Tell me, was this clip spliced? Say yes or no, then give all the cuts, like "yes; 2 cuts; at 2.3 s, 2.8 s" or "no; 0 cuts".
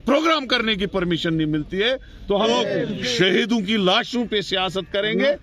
yes; 1 cut; at 2.4 s